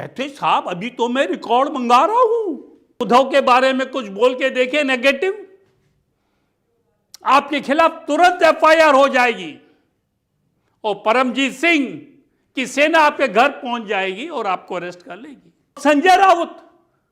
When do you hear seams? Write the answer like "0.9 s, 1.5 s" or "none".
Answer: 3.0 s, 15.8 s